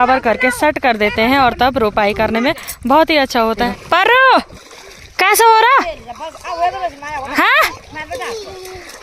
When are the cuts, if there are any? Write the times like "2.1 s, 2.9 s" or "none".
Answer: 3.7 s